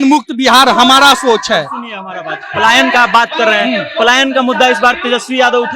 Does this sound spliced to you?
no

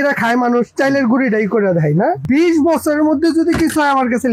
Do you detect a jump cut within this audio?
yes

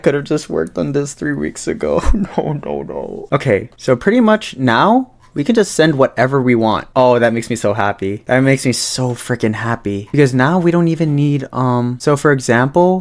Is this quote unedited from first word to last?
yes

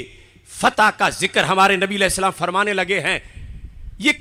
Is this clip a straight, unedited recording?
yes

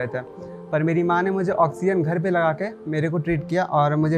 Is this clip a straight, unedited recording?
yes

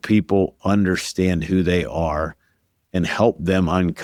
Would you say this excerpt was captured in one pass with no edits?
yes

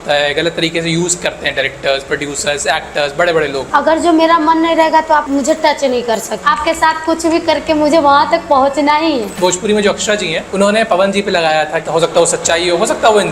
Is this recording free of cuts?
no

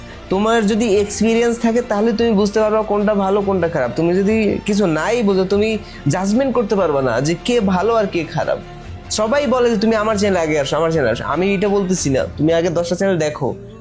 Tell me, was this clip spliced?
no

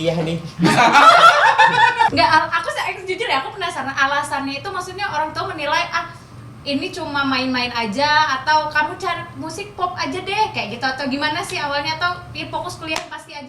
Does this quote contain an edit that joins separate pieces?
yes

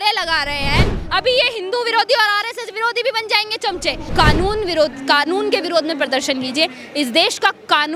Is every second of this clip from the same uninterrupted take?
no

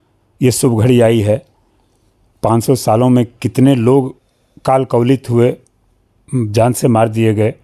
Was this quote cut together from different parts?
no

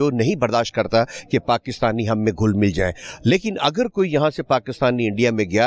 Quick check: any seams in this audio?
no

